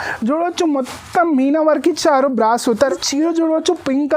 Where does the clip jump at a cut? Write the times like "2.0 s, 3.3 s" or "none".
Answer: 2.8 s